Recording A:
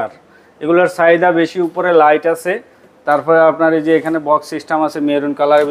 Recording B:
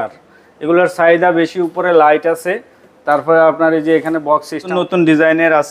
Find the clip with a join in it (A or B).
B